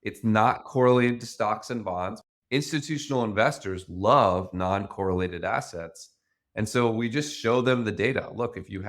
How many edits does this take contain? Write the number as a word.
one